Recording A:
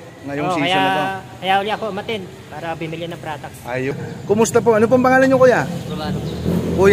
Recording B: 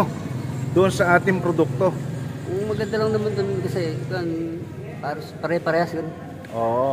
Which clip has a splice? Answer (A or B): A